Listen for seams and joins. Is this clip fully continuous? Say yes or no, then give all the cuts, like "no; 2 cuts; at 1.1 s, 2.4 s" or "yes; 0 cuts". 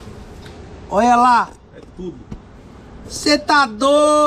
yes; 0 cuts